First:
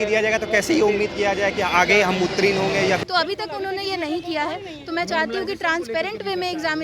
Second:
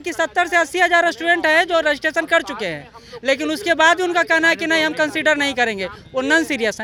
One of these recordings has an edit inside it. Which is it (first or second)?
first